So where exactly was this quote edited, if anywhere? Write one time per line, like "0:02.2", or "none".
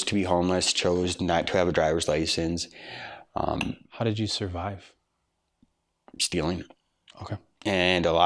none